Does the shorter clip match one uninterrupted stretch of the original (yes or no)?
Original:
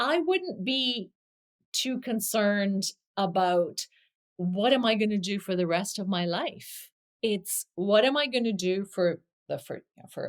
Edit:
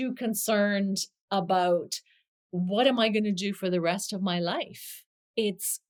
yes